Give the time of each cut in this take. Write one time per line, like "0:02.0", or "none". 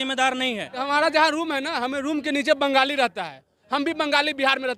0:00.8
0:03.6